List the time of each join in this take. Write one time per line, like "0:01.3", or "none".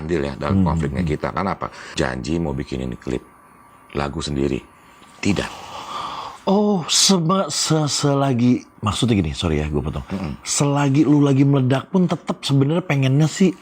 0:01.8